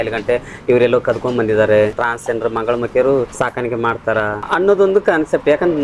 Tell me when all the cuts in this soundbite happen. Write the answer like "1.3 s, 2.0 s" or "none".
2.1 s, 3.3 s, 4.4 s